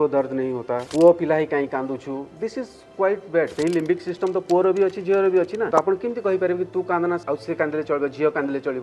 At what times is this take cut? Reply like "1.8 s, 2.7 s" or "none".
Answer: 0.9 s, 3.5 s, 5.7 s, 7.2 s